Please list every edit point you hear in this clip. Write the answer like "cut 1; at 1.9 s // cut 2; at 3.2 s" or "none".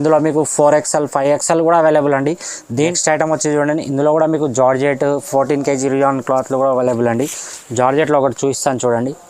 cut 1; at 2.9 s